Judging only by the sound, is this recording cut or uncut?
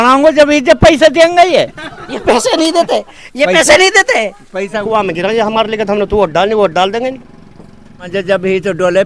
cut